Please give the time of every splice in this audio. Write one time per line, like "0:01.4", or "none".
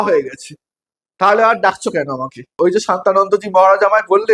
0:02.6